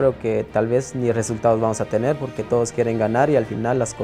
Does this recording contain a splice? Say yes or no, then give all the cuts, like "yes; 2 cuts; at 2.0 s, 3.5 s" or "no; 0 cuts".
no; 0 cuts